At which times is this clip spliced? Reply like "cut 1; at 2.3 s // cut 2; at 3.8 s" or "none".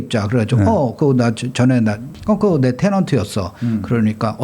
cut 1; at 2.1 s